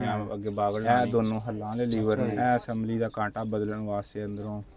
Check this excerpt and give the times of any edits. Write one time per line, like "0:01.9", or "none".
0:00.8
0:02.3